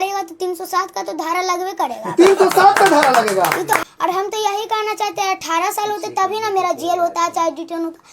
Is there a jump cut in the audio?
yes; 1 cut; at 3.8 s

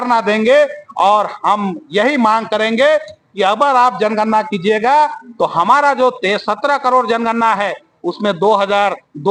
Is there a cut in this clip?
no; 0 cuts

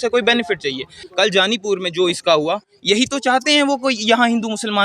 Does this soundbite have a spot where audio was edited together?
yes; 1 cut; at 1.0 s

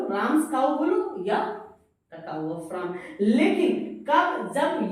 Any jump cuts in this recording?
no; 0 cuts

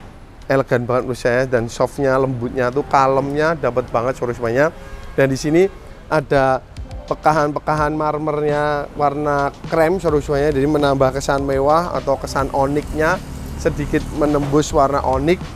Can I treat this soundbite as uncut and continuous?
yes; 0 cuts

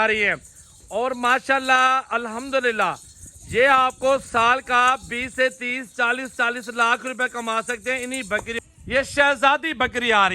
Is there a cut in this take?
yes; 1 cut; at 8.5 s

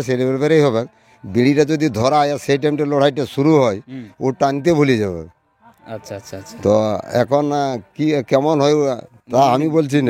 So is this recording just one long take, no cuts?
yes; 0 cuts

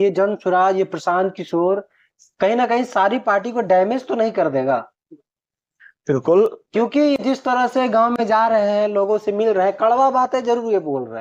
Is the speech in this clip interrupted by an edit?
no; 0 cuts

